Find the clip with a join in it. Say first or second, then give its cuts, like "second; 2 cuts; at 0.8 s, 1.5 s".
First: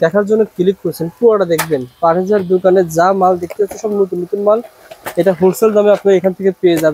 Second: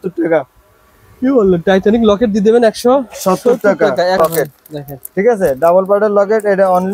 second; 1 cut; at 4.2 s